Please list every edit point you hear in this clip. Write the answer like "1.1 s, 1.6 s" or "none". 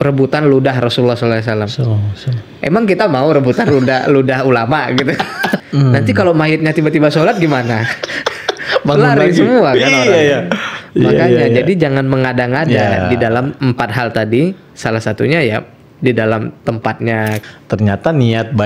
5.6 s, 13.6 s, 17.4 s